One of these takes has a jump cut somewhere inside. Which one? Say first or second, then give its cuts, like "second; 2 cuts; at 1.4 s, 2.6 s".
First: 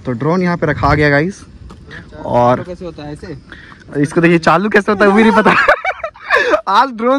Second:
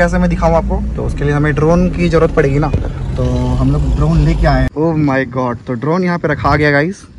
second; 1 cut; at 4.7 s